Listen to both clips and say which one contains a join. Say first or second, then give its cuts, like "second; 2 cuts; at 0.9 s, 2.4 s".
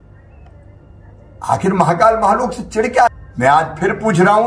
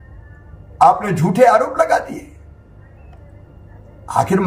first; 1 cut; at 3.1 s